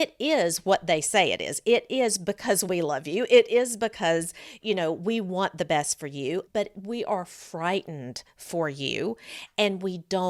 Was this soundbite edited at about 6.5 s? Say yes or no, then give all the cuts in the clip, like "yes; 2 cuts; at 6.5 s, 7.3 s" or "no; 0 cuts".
yes; 1 cut; at 6.5 s